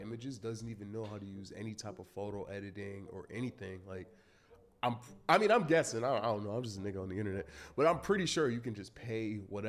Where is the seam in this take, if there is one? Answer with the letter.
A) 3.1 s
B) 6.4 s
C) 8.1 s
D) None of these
D